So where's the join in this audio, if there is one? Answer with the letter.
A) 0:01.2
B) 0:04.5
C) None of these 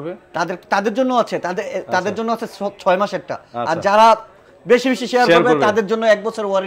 C